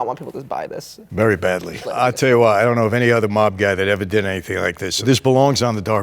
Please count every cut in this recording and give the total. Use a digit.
2